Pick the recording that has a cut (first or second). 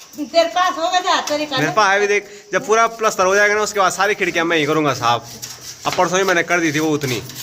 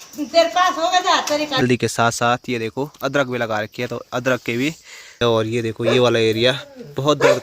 second